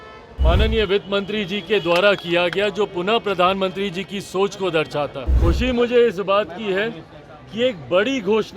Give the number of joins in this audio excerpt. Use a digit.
1